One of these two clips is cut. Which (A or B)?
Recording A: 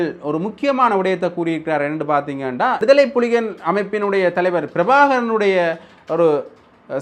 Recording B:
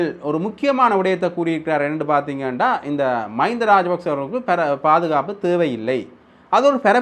A